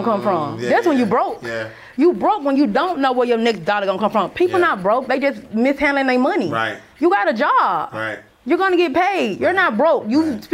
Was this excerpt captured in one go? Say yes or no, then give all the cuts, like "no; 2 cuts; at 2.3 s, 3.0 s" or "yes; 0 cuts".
yes; 0 cuts